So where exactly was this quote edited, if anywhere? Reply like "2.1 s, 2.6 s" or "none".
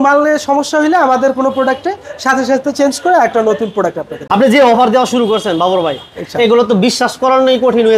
none

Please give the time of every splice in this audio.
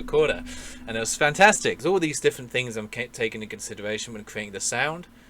1.8 s

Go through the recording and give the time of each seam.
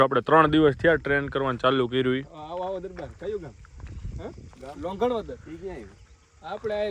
none

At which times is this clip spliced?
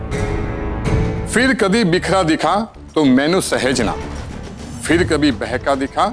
1.2 s, 4.1 s

